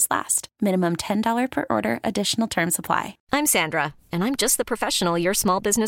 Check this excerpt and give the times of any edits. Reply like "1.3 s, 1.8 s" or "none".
3.2 s